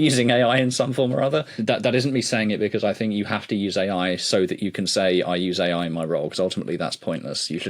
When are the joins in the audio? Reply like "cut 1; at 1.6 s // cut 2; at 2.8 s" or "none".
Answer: cut 1; at 1.5 s